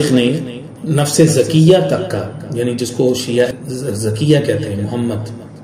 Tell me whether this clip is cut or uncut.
cut